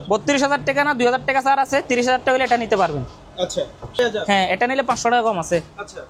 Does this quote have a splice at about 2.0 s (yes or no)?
no